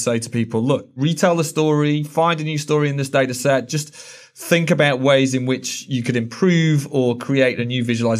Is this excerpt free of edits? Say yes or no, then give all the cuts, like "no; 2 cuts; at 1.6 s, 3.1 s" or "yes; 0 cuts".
no; 1 cut; at 0.9 s